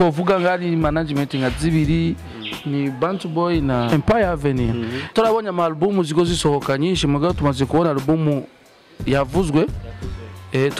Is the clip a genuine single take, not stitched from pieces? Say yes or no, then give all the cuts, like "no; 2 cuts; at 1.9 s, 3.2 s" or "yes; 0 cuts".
no; 2 cuts; at 3.9 s, 5.1 s